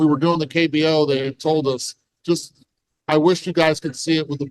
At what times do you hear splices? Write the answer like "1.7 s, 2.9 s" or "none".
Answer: none